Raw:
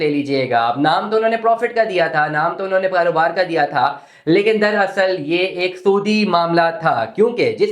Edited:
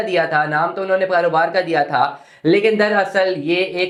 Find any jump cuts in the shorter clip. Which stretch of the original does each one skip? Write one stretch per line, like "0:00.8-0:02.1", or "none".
none